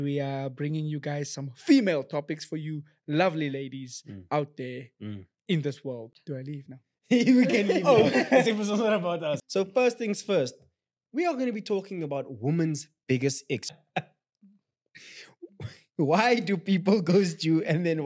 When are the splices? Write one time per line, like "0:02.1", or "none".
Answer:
0:06.1
0:09.4
0:13.7